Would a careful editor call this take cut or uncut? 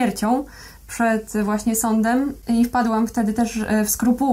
cut